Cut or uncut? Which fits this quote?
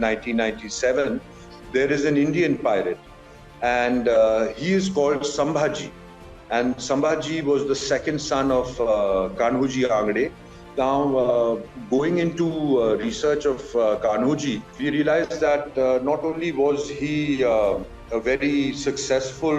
cut